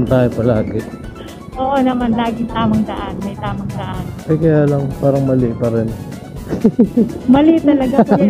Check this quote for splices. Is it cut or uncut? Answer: cut